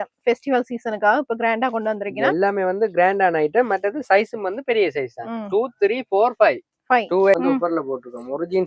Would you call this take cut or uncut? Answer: cut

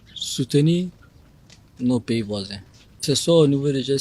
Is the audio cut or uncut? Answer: cut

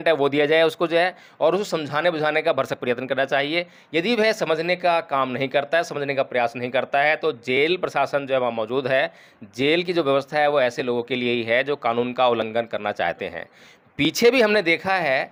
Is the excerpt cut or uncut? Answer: uncut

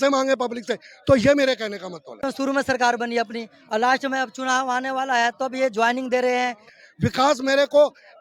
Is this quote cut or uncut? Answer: cut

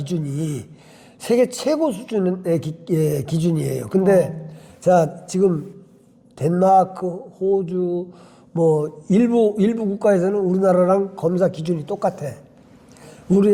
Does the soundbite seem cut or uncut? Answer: uncut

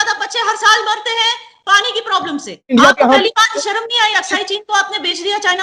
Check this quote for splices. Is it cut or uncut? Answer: cut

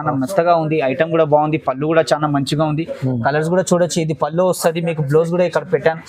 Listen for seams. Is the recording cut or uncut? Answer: uncut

